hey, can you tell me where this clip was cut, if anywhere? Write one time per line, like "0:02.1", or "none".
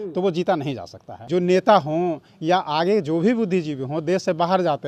0:01.1